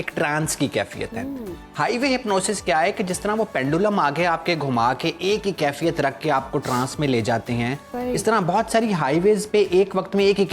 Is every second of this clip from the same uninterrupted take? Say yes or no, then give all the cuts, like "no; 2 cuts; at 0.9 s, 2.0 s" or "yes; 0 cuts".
yes; 0 cuts